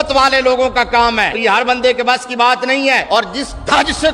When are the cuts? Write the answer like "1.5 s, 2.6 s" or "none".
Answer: 1.4 s, 3.0 s